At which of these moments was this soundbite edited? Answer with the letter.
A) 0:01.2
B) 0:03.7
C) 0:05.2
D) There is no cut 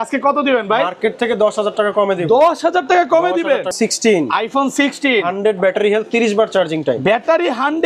B